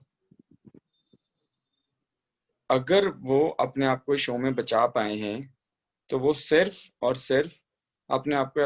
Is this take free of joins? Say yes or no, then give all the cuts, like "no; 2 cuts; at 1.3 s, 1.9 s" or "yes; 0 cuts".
yes; 0 cuts